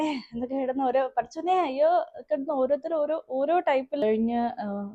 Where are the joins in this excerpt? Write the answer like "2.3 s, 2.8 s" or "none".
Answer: 4.0 s